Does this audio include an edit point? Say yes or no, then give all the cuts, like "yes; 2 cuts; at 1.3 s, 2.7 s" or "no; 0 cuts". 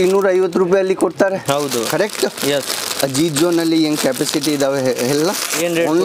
no; 0 cuts